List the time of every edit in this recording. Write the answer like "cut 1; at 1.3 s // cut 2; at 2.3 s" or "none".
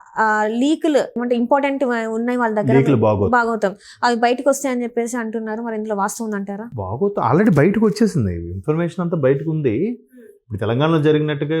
cut 1; at 1.2 s